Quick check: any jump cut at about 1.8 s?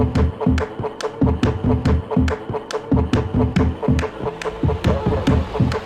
yes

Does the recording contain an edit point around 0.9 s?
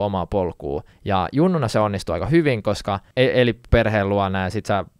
yes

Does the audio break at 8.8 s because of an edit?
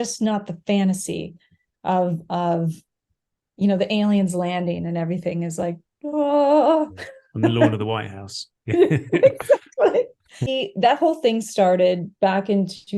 no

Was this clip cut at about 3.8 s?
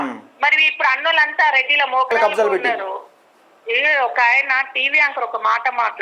no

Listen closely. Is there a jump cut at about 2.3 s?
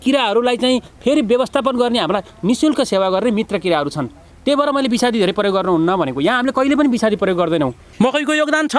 no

